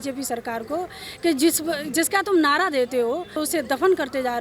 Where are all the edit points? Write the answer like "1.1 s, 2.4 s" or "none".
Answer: 3.4 s